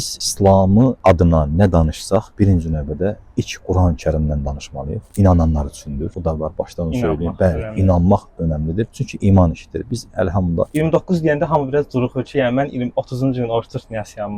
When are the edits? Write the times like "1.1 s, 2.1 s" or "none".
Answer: 5.1 s, 10.7 s

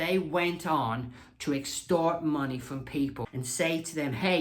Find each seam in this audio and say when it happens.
3.2 s

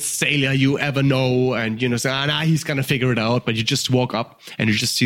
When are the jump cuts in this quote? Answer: none

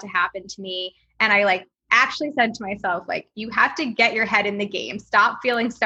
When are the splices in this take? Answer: none

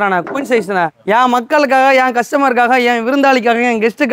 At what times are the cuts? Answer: none

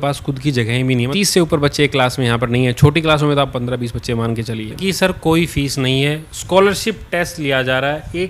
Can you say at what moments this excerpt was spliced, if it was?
1.1 s, 4.8 s

